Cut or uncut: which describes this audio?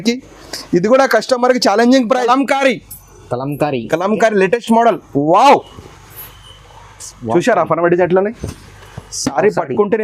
cut